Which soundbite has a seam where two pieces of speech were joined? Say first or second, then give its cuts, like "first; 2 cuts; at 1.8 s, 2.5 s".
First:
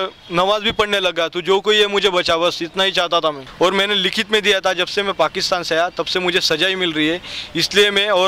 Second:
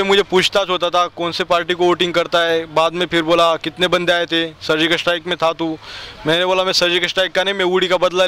first; 1 cut; at 3.4 s